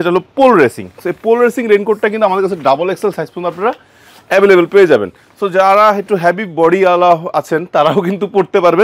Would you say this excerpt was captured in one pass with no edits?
yes; 0 cuts

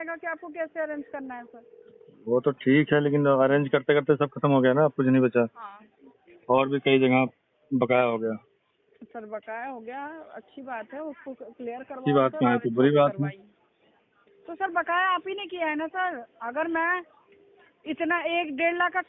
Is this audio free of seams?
yes; 0 cuts

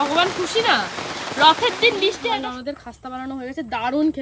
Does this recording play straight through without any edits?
no; 1 cut; at 2.2 s

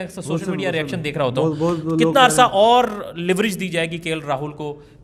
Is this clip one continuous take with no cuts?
yes; 0 cuts

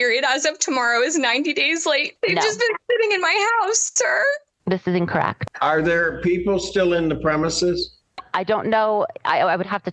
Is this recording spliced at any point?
yes; 2 cuts; at 2.1 s, 5.4 s

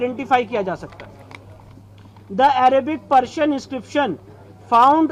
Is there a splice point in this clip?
no; 0 cuts

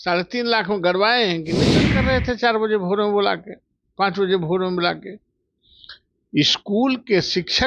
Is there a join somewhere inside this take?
yes; 1 cut; at 1.9 s

